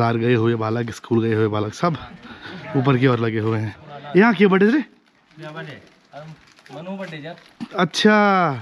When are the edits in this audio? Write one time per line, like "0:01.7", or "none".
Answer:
none